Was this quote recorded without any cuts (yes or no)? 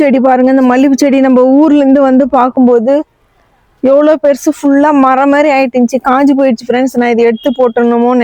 yes